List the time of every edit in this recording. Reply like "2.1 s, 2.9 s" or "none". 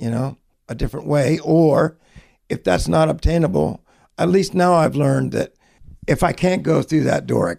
none

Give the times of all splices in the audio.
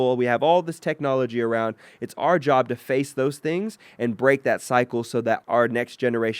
5.4 s

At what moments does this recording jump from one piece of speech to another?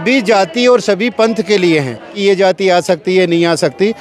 2.1 s

